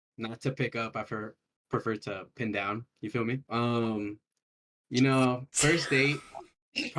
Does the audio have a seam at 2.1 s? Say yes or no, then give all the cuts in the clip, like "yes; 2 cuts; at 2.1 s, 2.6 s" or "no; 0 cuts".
no; 1 cut; at 3.4 s